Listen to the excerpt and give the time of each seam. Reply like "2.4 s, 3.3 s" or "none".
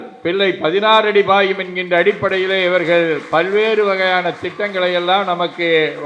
none

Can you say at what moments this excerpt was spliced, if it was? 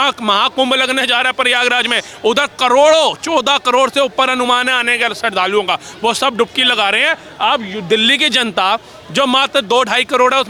none

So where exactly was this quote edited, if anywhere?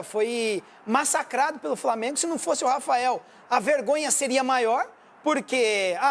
none

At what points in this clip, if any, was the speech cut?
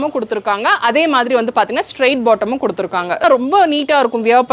3.2 s

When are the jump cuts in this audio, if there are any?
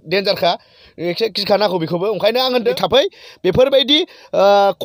2.8 s

